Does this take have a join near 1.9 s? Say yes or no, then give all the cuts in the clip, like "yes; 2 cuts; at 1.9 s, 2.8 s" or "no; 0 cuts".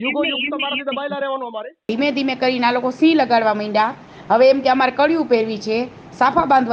yes; 1 cut; at 1.9 s